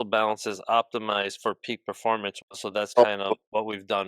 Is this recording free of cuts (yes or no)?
no